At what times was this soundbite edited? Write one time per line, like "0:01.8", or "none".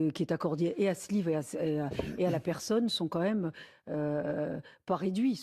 0:04.1

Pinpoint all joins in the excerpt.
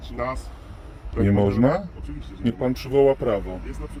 none

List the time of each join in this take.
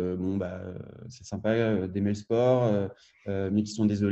none

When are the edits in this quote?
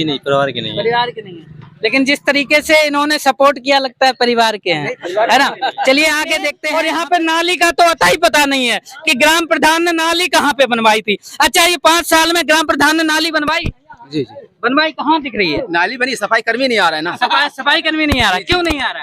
0:06.5

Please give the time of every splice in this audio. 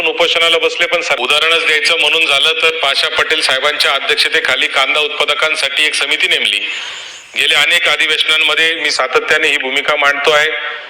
0:01.2

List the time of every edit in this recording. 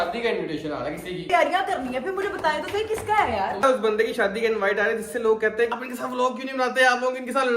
0:01.3
0:03.6
0:05.7

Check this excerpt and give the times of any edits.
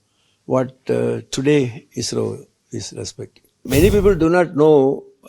0:03.7

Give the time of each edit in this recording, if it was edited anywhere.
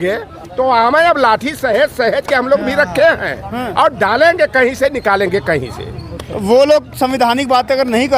none

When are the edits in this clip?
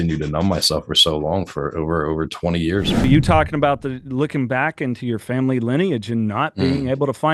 0:03.0

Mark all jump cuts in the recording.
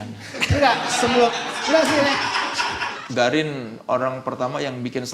0:03.0

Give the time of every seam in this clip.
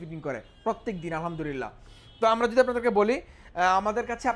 none

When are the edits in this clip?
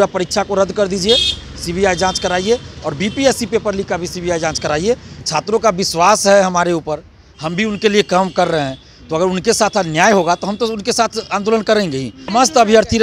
0:05.2
0:12.3

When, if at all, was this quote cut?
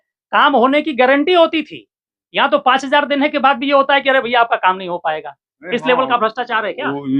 none

